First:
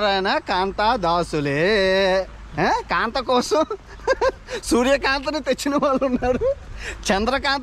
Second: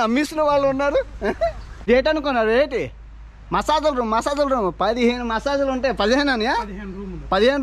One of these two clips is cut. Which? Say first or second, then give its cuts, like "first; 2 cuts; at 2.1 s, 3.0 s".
second; 1 cut; at 1.7 s